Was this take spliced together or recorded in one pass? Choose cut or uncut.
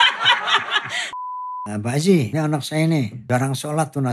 cut